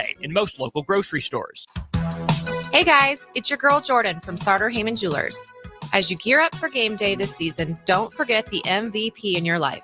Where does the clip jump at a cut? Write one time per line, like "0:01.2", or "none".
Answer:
0:01.5